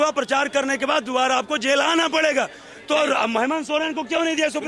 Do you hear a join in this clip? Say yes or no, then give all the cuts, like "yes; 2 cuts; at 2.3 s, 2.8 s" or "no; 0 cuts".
no; 0 cuts